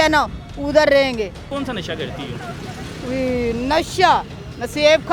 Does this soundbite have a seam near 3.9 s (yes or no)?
no